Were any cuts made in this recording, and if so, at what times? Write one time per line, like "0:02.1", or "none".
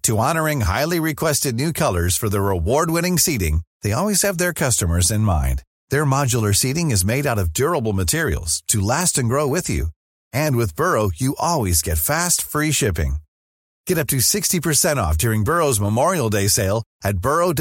none

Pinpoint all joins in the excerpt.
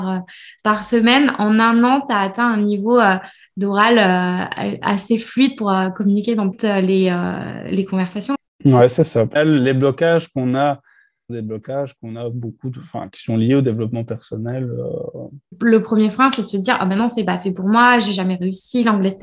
0:06.6
0:08.4
0:09.4
0:11.3
0:15.5

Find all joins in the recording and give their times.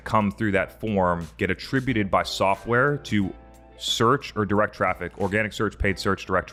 none

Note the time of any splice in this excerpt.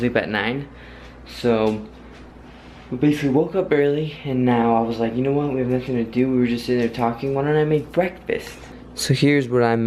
0:07.7

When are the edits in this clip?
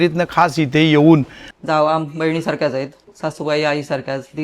0:01.4
0:03.1

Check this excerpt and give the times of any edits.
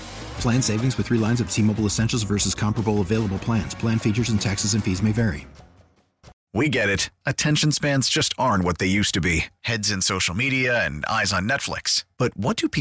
0:06.3

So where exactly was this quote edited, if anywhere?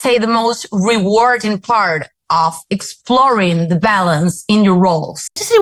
none

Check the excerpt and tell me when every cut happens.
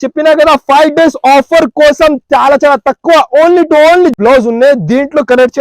0:04.1

